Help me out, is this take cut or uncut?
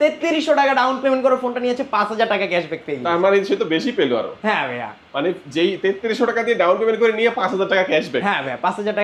uncut